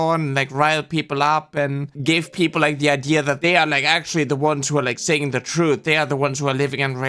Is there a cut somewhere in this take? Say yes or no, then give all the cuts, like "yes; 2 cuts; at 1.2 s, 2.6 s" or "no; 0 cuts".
yes; 2 cuts; at 1.9 s, 3.4 s